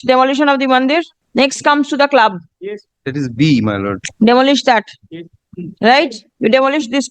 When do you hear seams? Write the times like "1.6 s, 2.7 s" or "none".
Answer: 1.2 s, 4.1 s, 6.2 s